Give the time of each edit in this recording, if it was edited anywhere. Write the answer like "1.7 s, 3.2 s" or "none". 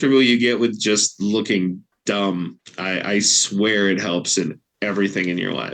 1.9 s, 2.7 s